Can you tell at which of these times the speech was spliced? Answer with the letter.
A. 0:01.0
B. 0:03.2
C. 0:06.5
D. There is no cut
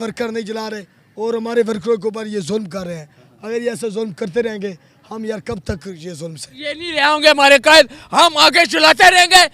C